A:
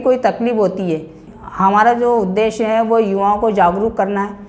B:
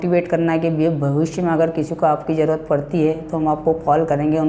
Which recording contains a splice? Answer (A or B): A